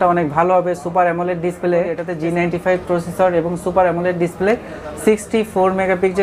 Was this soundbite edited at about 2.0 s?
yes; 1 cut; at 2.0 s

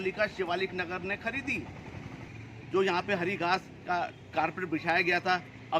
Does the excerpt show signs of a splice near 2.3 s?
yes; 1 cut; at 2.3 s

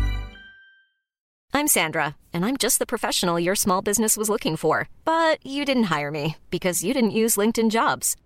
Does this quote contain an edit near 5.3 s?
no; 1 cut; at 1.4 s

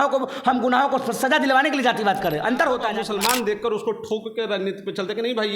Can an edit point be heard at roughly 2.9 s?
yes; 1 cut; at 2.9 s

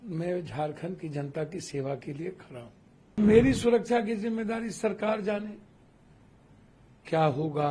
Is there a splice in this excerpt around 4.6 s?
no; 1 cut; at 3.1 s

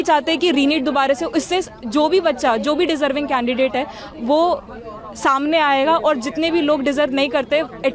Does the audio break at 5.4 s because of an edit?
no; 0 cuts

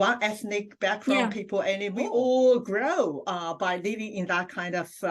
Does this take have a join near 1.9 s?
yes; 1 cut; at 1.9 s

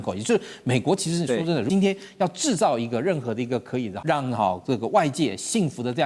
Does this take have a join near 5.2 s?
no; 2 cuts; at 1.7 s, 3.9 s

